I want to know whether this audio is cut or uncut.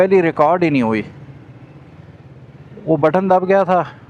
uncut